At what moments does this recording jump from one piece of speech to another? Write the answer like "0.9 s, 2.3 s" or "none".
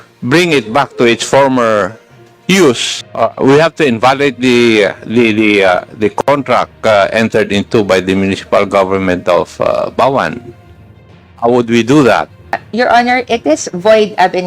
3.0 s, 12.6 s